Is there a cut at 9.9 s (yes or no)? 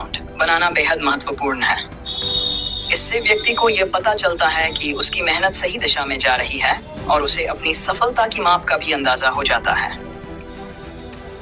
yes